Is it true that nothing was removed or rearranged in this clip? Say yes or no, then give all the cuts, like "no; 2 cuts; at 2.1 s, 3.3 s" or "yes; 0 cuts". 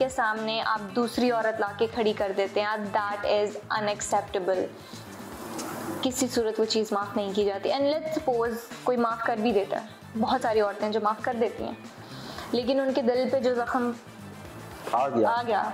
yes; 0 cuts